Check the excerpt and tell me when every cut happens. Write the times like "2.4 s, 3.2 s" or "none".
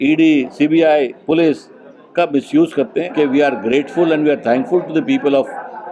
3.1 s